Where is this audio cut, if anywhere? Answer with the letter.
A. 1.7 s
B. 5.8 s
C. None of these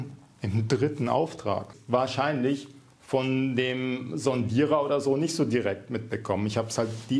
A